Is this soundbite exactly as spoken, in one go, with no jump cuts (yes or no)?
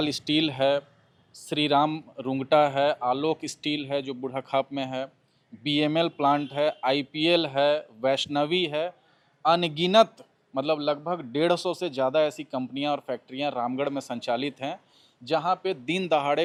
yes